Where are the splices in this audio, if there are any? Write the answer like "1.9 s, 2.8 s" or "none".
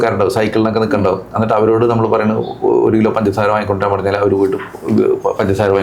none